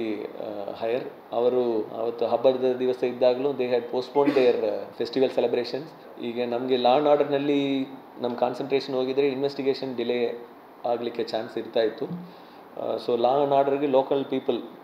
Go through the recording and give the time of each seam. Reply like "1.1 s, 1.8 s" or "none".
6.1 s